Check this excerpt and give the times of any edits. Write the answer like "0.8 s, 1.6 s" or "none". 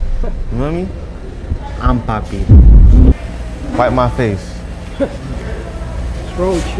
3.1 s